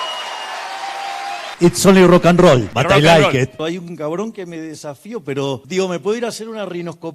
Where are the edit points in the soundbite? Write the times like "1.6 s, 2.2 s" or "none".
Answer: 1.5 s, 2.7 s, 3.6 s, 5.6 s

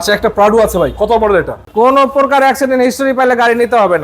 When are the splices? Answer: 1.6 s

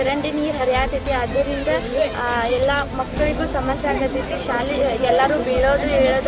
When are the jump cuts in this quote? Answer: none

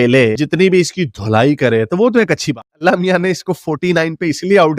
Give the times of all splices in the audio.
2.8 s

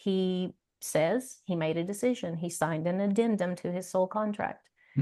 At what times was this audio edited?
none

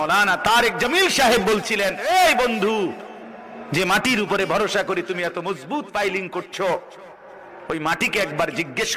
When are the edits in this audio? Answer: 2.0 s

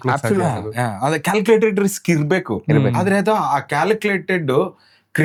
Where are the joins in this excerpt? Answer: none

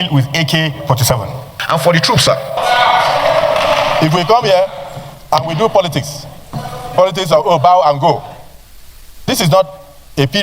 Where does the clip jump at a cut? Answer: 2.6 s

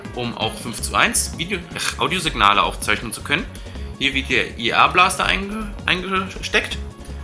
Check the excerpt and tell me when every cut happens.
3.2 s

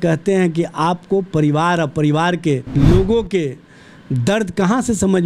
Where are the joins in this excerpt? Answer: 2.7 s

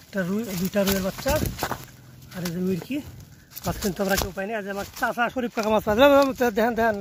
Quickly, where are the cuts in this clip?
none

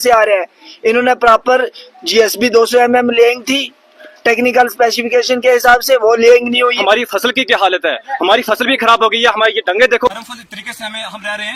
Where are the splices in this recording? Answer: 6.8 s

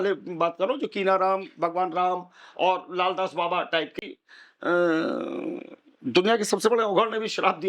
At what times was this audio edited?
4.0 s

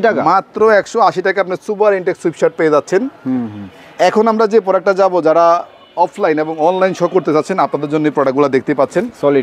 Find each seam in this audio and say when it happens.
none

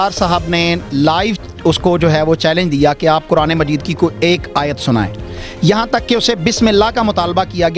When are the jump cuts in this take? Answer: none

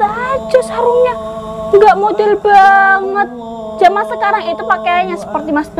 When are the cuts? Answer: none

